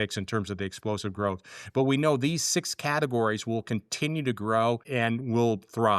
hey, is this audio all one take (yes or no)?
no